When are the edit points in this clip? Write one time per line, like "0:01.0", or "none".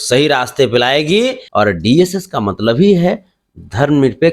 0:01.4